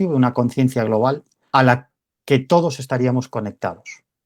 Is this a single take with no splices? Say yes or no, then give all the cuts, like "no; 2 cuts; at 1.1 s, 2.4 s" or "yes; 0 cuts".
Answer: no; 1 cut; at 1.3 s